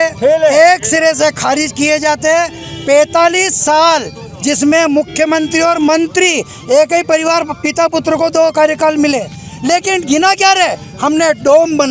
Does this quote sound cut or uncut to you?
uncut